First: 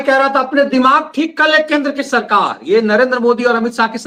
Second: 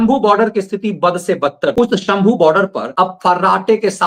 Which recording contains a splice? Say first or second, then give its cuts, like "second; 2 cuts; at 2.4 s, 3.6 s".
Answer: second; 2 cuts; at 1.7 s, 2.8 s